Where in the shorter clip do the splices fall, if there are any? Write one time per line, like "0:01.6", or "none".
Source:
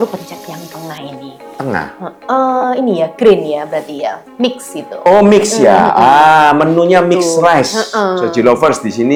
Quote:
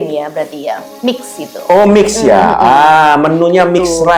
none